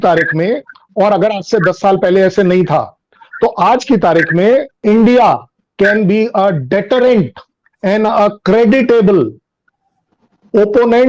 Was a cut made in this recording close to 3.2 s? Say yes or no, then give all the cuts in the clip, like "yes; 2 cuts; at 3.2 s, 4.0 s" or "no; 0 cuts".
no; 1 cut; at 4.8 s